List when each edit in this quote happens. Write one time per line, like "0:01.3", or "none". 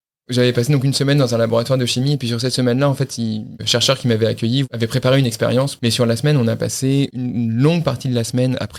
0:03.6
0:04.7
0:05.7
0:07.2